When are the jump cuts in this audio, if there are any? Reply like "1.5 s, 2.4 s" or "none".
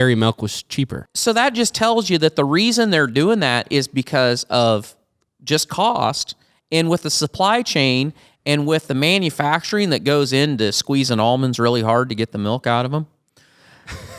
1.0 s